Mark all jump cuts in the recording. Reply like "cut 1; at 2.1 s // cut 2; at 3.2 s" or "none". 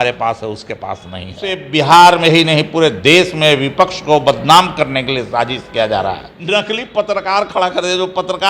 cut 1; at 1.6 s // cut 2; at 6.3 s